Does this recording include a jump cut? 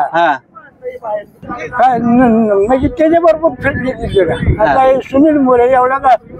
yes; 1 cut; at 1.5 s

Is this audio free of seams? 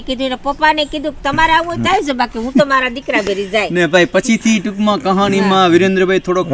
yes; 0 cuts

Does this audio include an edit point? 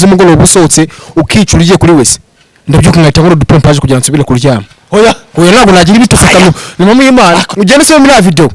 yes; 1 cut; at 7.5 s

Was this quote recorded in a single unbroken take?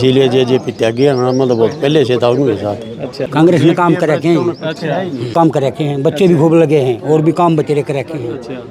no; 2 cuts; at 3.3 s, 5.3 s

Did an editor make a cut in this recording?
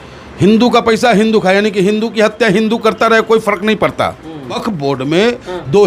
yes; 1 cut; at 4.6 s

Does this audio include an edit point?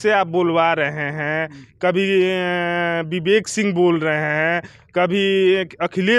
no; 0 cuts

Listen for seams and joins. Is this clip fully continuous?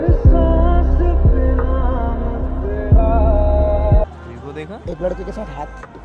no; 1 cut; at 4.0 s

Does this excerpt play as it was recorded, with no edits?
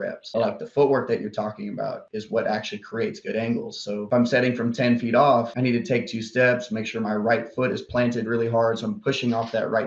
no; 1 cut; at 2.0 s

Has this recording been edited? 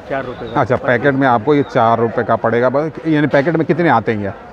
no; 0 cuts

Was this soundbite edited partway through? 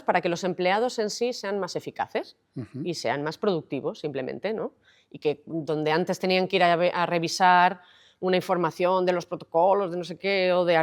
no; 0 cuts

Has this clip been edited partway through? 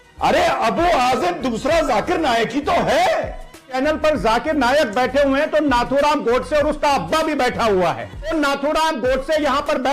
yes; 2 cuts; at 3.8 s, 8.3 s

